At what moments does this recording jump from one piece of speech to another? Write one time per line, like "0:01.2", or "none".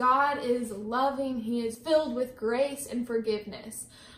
0:01.8